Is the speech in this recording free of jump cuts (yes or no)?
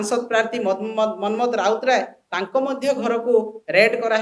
yes